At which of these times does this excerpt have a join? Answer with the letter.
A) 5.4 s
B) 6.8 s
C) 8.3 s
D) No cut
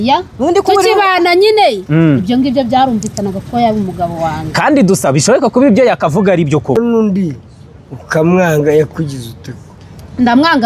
B